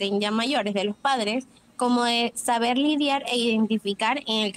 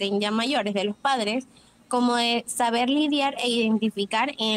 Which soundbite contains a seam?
first; 1 cut; at 1.6 s

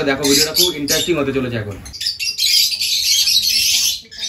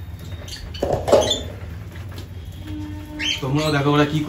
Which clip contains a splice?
first; 1 cut; at 1.9 s

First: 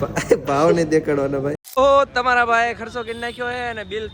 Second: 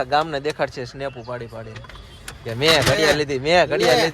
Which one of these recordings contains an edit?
first; 1 cut; at 1.6 s

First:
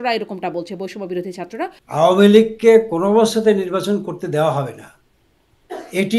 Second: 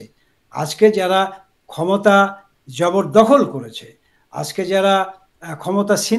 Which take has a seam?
first; 1 cut; at 1.7 s

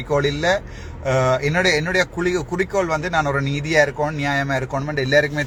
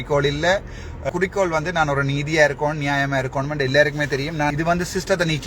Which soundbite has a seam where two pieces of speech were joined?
second; 2 cuts; at 1.1 s, 4.5 s

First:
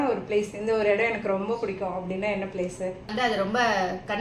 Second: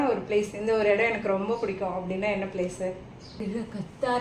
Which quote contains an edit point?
first; 1 cut; at 3.1 s

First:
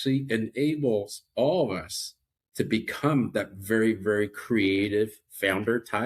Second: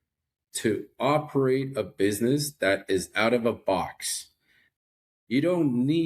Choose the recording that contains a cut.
second; 1 cut; at 4.8 s

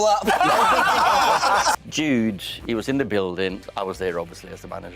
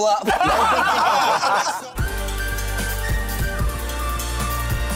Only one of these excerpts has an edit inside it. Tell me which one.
first; 2 cuts; at 1.9 s, 3.6 s

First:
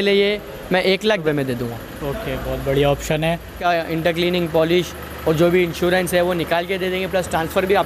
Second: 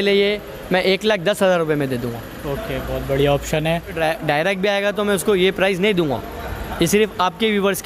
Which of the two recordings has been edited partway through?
first; 2 cuts; at 1.2 s, 3.6 s

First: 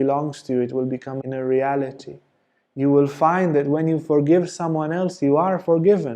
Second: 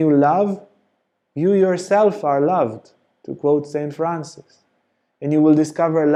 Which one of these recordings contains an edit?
first; 1 cut; at 1.2 s

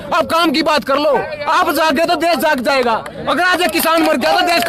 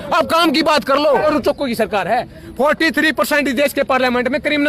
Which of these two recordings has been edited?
second; 1 cut; at 1.2 s

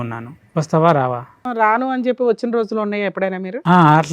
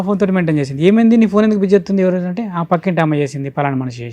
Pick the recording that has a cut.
first; 1 cut; at 1.4 s

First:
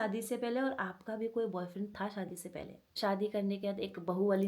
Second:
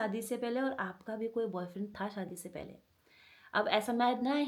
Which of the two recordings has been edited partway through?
first; 1 cut; at 2.9 s

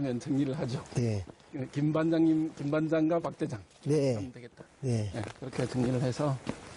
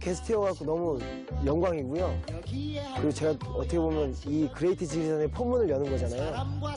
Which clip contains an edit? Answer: first; 1 cut; at 2.8 s

